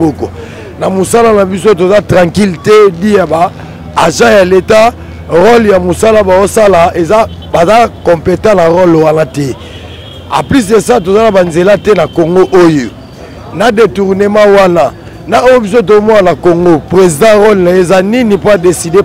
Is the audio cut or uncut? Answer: uncut